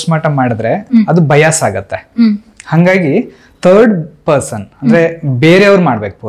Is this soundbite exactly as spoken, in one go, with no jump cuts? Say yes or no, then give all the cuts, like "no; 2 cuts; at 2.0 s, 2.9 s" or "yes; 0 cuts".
yes; 0 cuts